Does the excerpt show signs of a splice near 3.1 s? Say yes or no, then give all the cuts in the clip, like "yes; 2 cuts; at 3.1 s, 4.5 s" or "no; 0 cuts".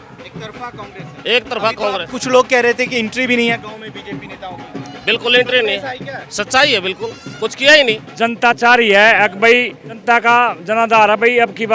no; 2 cuts; at 8.1 s, 9.9 s